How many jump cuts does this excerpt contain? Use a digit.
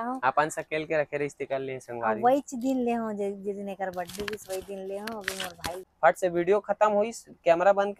1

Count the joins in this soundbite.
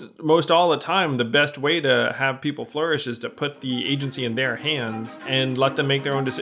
1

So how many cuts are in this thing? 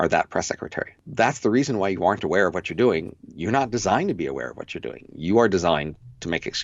1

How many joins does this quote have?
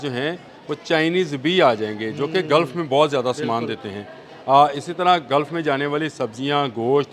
0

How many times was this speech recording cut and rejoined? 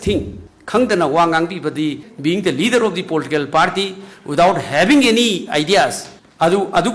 1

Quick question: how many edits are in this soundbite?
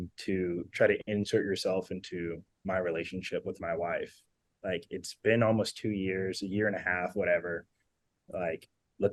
0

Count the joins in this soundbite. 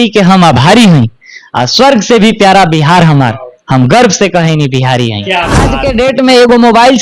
1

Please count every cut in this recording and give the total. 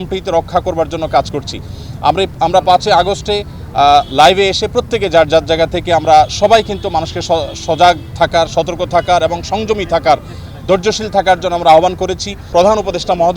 1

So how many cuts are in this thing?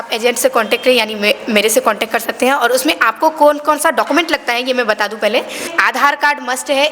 1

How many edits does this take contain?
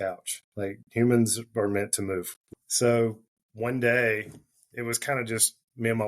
1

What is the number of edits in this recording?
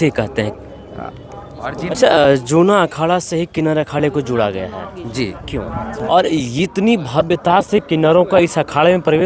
2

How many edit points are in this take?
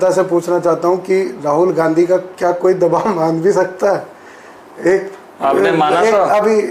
0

